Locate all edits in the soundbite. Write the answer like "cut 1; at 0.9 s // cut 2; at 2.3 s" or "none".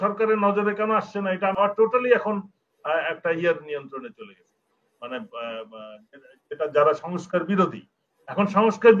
cut 1; at 1.6 s